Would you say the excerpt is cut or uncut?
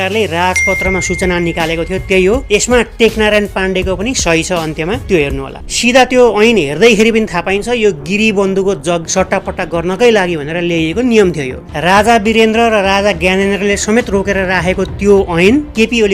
cut